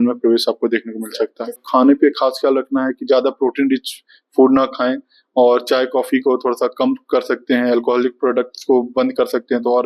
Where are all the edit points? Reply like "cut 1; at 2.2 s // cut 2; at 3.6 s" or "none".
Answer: cut 1; at 1.6 s